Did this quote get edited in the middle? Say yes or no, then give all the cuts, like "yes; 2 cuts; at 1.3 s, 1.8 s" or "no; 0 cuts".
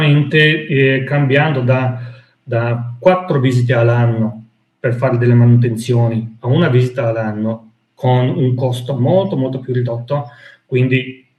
no; 0 cuts